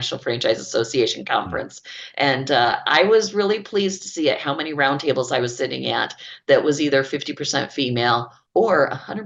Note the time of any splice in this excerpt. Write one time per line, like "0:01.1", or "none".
0:08.4